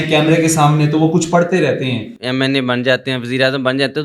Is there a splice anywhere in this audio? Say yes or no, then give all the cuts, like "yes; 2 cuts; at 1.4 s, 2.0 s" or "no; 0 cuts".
yes; 1 cut; at 2.1 s